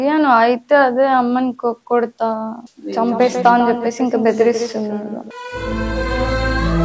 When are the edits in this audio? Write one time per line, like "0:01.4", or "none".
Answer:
none

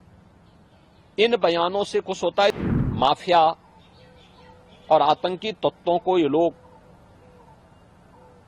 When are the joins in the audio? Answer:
0:02.6

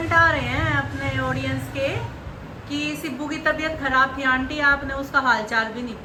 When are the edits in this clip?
none

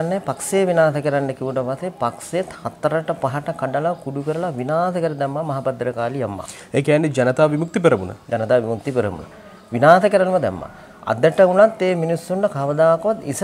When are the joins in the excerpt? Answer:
none

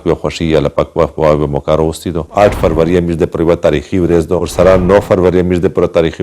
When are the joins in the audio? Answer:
0:02.2

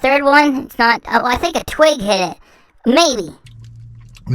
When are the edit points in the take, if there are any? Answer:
0:03.4

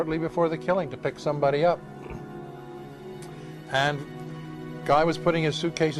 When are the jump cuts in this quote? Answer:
0:01.8

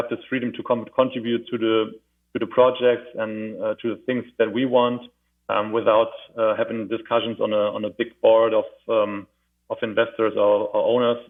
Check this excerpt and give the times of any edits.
none

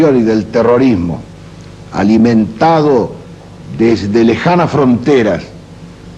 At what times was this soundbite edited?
0:03.5

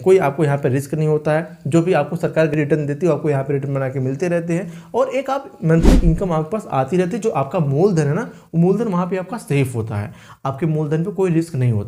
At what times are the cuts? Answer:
0:02.5

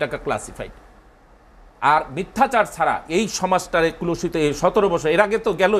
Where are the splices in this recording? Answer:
none

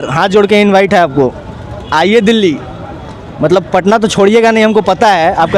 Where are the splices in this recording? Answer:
none

